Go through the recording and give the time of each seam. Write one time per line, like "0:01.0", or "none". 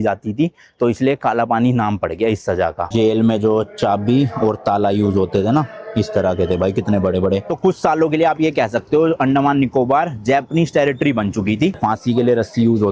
0:02.9
0:07.5
0:11.7